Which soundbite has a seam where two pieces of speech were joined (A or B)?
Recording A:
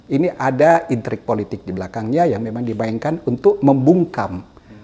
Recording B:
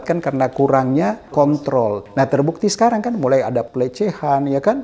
B